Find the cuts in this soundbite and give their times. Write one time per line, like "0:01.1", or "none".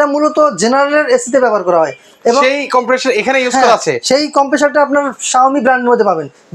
none